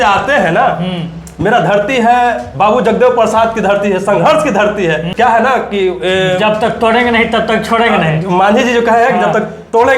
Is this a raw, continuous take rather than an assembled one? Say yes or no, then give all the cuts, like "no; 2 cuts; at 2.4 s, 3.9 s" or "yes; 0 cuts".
no; 1 cut; at 5.1 s